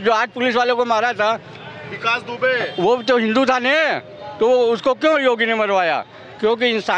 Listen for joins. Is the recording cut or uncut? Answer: uncut